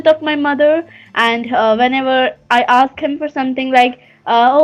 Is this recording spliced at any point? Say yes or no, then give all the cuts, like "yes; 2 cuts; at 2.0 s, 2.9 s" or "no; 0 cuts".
no; 0 cuts